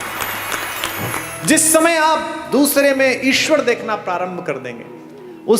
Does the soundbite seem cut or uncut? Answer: cut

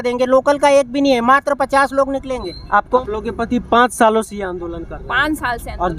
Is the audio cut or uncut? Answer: cut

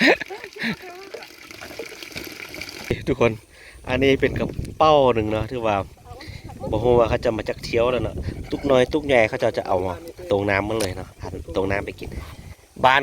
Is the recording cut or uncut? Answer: cut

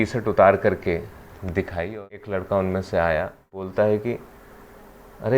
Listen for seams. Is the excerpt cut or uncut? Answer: cut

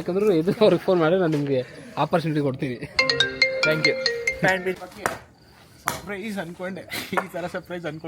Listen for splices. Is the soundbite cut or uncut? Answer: cut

